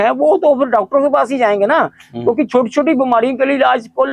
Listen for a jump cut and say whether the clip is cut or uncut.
uncut